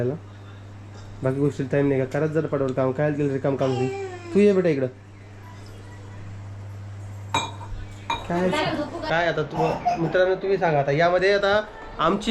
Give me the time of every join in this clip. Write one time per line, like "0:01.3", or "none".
0:09.1